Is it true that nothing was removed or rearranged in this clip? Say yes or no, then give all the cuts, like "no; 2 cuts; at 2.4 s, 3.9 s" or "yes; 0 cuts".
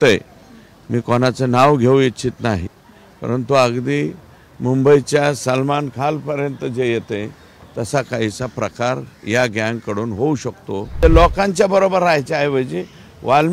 no; 1 cut; at 11.0 s